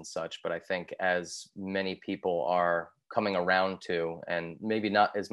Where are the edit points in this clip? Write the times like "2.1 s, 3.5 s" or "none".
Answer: none